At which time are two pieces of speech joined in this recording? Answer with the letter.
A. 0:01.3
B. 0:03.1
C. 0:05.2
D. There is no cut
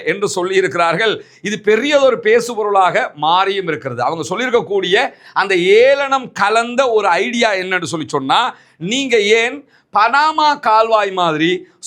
D